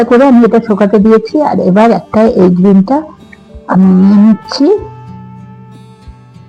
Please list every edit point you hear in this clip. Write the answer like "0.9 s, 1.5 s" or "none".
4.9 s

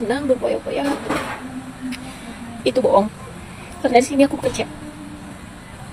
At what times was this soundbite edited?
none

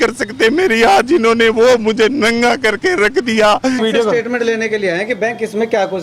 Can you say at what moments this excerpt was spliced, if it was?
3.8 s

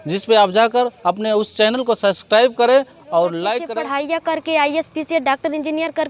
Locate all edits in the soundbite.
3.7 s

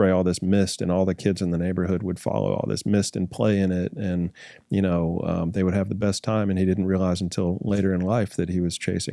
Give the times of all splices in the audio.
none

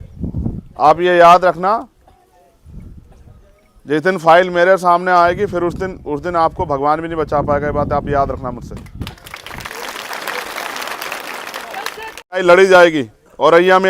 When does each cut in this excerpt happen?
12.4 s

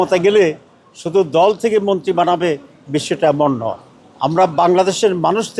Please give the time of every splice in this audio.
none

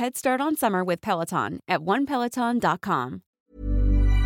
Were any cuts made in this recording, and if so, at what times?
3.2 s

